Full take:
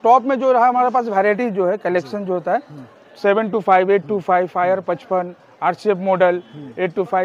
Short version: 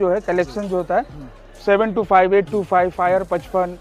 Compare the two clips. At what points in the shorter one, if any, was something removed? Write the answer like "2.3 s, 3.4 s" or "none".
none